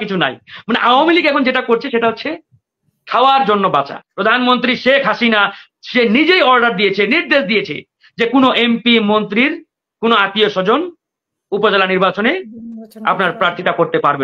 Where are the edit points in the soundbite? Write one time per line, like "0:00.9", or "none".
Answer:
0:04.0